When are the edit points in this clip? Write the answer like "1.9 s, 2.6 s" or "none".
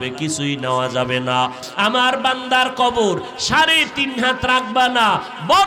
1.6 s